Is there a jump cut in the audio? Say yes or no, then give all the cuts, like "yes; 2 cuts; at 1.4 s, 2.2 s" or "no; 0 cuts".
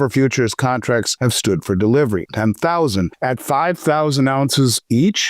yes; 3 cuts; at 1.1 s, 2.3 s, 3.1 s